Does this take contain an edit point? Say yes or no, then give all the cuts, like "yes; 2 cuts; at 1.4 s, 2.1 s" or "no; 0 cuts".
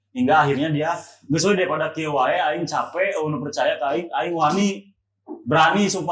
no; 0 cuts